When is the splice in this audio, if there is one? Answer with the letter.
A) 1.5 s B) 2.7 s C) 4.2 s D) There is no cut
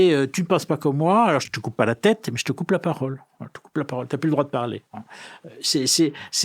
A